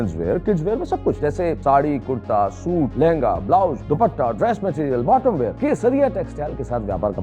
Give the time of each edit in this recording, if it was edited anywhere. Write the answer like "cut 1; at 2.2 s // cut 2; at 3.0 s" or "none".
cut 1; at 1.3 s // cut 2; at 2.9 s // cut 3; at 3.8 s // cut 4; at 5.5 s